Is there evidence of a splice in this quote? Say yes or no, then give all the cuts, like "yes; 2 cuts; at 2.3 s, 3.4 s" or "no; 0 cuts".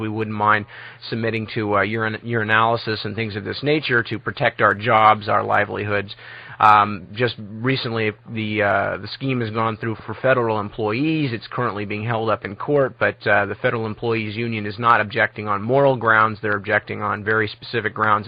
yes; 1 cut; at 11.7 s